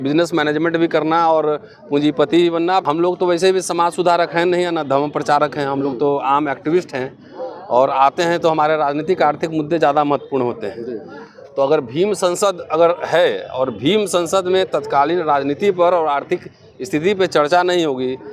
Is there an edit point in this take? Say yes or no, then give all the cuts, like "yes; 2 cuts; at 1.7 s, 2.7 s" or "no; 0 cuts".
yes; 1 cut; at 2.8 s